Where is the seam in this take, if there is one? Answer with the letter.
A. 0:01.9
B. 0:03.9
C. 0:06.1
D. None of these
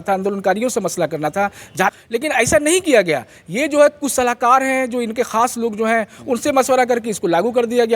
A